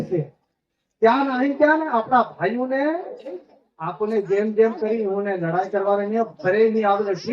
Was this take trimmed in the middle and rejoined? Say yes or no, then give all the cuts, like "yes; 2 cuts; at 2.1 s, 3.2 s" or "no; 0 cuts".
yes; 1 cut; at 3.4 s